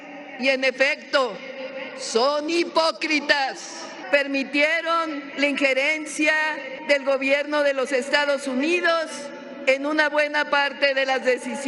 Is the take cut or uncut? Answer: cut